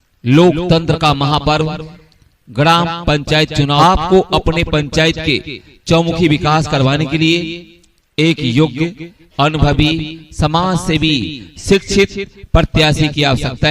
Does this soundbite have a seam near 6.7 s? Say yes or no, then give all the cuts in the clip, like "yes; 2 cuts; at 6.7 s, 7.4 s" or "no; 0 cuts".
no; 1 cut; at 3.8 s